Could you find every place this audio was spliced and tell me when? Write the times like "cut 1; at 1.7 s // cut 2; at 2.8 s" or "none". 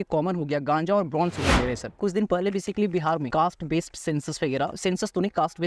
cut 1; at 2.0 s // cut 2; at 3.3 s